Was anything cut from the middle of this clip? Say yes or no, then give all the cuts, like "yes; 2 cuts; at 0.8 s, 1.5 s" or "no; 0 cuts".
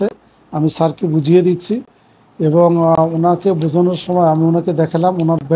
no; 0 cuts